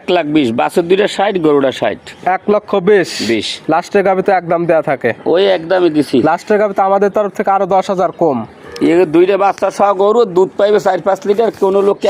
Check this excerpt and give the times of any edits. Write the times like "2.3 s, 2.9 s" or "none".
none